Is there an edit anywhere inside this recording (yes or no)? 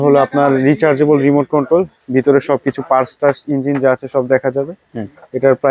no